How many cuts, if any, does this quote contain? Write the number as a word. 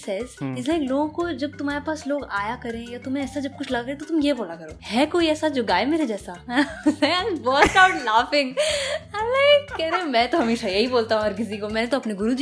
zero